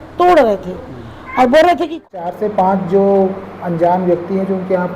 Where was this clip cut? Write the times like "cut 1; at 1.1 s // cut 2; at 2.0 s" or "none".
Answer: cut 1; at 2.0 s